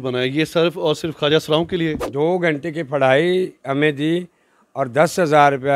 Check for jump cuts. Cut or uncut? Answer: cut